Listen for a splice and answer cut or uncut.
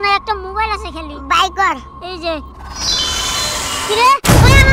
uncut